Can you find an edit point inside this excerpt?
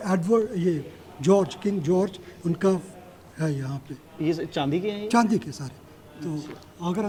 no; 0 cuts

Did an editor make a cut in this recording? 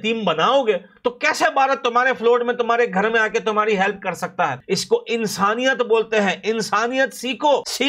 yes; 1 cut; at 4.6 s

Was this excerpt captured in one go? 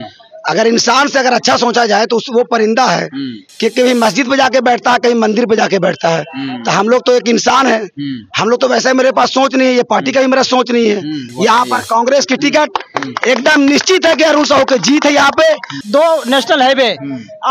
no; 2 cuts; at 11.3 s, 15.7 s

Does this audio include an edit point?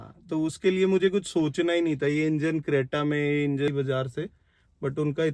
yes; 1 cut; at 3.7 s

